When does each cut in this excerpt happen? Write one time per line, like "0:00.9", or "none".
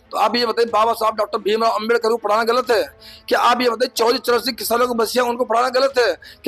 none